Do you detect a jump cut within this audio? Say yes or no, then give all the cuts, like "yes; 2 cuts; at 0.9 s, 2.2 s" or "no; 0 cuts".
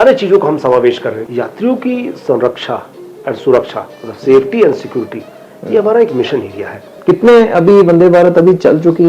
yes; 2 cuts; at 1.2 s, 7.0 s